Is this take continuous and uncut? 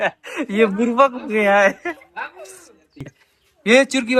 no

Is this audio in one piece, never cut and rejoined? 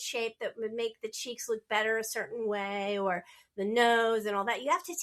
yes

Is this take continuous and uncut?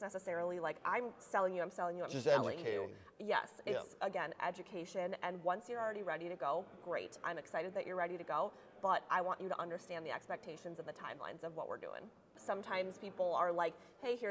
no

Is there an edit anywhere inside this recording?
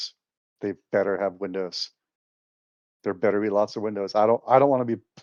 no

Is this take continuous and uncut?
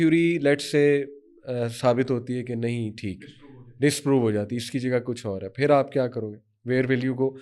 yes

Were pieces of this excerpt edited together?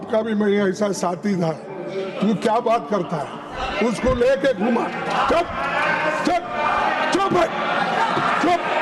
no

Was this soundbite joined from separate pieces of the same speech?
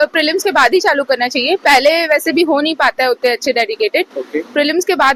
no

